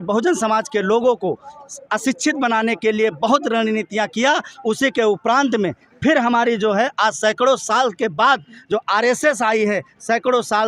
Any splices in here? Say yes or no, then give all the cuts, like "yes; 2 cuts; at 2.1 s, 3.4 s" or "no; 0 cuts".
no; 0 cuts